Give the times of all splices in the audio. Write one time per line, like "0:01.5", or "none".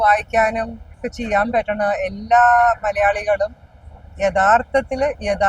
0:01.0